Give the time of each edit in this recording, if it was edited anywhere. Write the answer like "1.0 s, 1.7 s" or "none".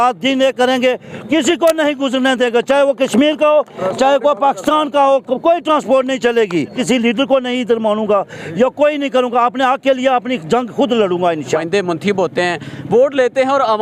6.8 s, 11.6 s